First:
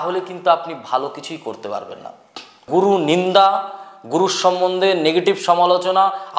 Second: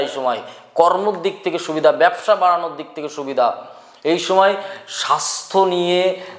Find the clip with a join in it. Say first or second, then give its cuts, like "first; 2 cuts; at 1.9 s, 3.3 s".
first; 1 cut; at 2.6 s